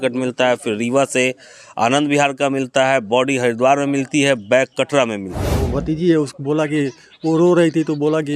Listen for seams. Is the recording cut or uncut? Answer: cut